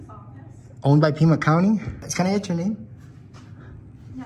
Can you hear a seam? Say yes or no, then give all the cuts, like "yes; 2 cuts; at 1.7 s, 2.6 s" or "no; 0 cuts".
yes; 1 cut; at 2.1 s